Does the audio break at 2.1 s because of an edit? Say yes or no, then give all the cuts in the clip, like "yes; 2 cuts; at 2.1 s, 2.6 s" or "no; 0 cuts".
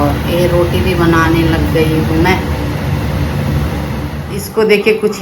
no; 1 cut; at 4.2 s